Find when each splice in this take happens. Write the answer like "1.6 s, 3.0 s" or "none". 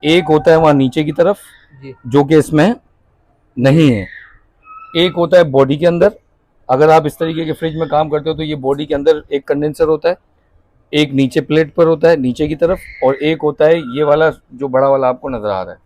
none